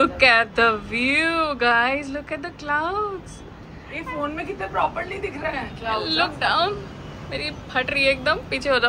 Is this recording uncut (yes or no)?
yes